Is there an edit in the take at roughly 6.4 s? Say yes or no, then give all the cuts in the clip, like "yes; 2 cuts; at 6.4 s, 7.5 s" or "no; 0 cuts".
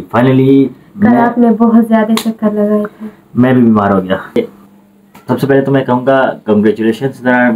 no; 1 cut; at 4.4 s